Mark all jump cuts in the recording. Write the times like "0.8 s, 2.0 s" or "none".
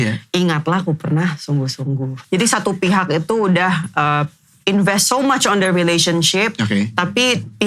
2.2 s